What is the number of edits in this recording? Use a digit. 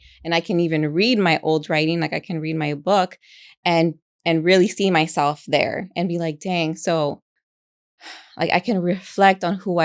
0